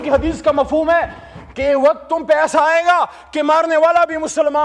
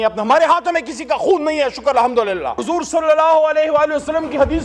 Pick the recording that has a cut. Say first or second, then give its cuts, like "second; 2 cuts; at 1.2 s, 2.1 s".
second; 1 cut; at 2.6 s